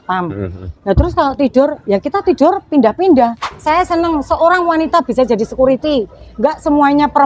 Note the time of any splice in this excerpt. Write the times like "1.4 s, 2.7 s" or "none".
3.5 s